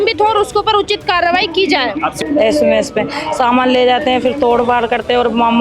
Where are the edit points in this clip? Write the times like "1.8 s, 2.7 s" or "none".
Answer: 2.1 s